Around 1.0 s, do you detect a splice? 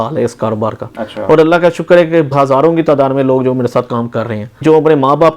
no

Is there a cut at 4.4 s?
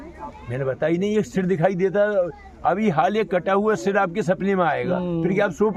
no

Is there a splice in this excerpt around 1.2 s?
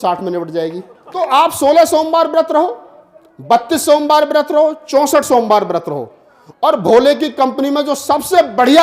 yes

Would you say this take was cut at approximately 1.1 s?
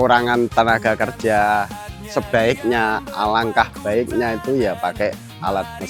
no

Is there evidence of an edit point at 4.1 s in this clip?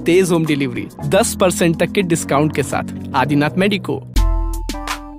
yes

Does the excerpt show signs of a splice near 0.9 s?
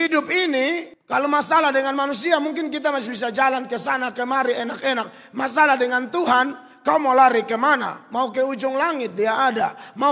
yes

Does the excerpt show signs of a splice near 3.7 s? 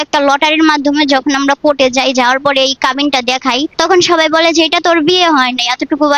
yes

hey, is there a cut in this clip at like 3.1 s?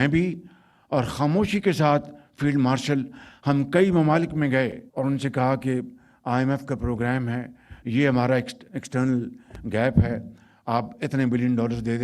no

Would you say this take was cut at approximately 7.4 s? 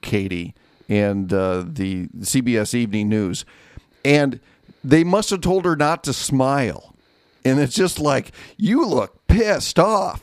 yes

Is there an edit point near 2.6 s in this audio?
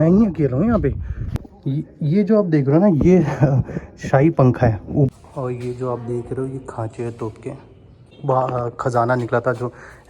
no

